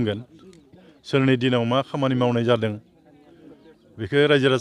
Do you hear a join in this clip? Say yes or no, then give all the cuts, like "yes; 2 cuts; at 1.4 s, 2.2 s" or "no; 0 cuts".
no; 0 cuts